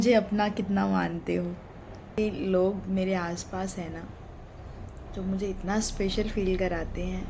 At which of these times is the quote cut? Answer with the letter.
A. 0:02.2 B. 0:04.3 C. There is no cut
A